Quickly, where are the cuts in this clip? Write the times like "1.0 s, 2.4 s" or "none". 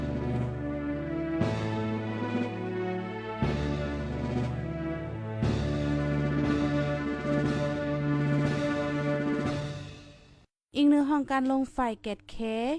none